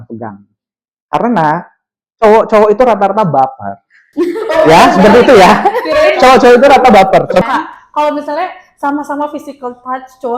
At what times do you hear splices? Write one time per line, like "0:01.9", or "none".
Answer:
0:07.4